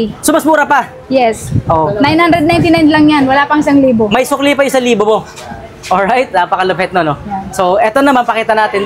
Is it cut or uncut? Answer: uncut